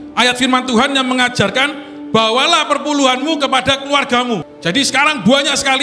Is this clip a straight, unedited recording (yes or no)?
no